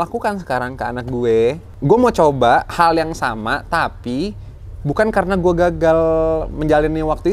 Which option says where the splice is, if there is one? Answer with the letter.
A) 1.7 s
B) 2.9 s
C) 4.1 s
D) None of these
A